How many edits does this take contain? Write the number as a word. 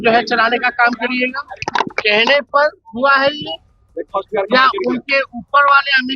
one